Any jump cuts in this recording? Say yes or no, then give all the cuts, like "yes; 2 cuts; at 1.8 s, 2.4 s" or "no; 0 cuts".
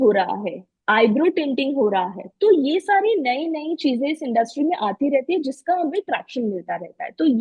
no; 0 cuts